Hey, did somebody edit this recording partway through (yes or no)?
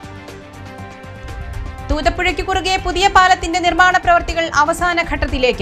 no